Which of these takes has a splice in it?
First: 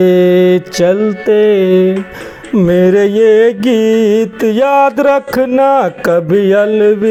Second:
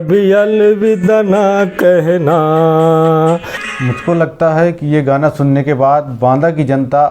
second; 1 cut; at 3.6 s

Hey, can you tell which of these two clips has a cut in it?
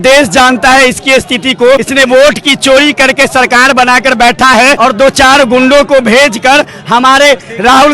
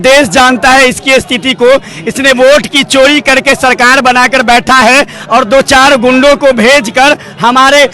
first; 2 cuts; at 1.9 s, 4.8 s

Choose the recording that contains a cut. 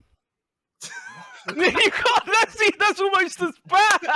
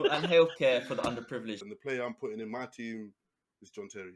second; 1 cut; at 1.6 s

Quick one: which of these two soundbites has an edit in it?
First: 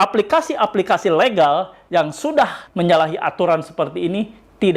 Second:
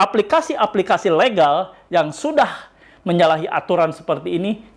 first; 1 cut; at 2.6 s

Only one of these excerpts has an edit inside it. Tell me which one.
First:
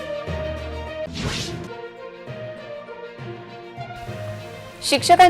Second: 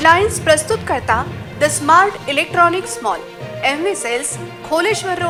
first; 1 cut; at 1.0 s

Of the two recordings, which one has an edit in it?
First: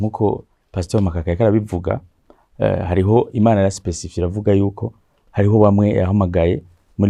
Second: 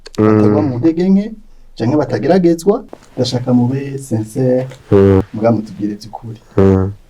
second; 2 cuts; at 3.0 s, 5.3 s

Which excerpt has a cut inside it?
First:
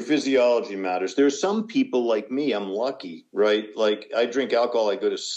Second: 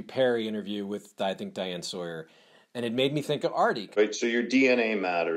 second; 1 cut; at 4.0 s

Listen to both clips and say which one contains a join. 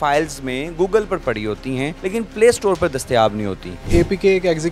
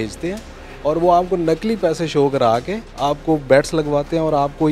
first; 2 cuts; at 1.9 s, 3.8 s

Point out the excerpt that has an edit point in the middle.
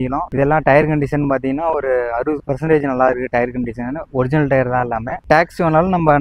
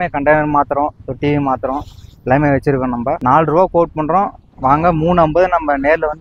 second; 1 cut; at 3.2 s

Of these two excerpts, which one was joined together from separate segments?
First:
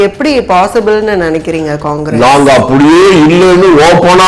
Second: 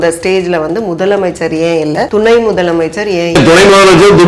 second; 2 cuts; at 2.1 s, 3.4 s

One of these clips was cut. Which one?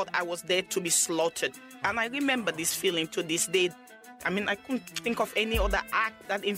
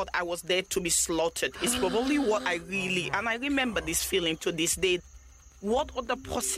first; 2 cuts; at 1.6 s, 4.2 s

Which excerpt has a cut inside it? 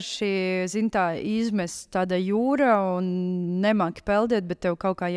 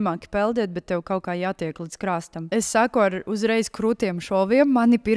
second; 1 cut; at 2.5 s

